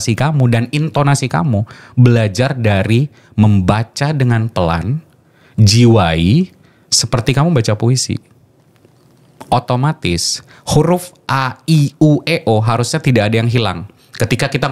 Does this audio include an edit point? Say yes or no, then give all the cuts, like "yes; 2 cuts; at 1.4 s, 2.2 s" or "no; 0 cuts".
no; 0 cuts